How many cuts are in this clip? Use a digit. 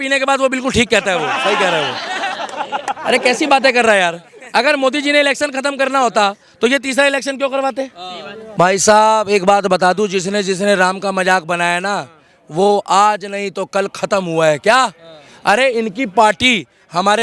1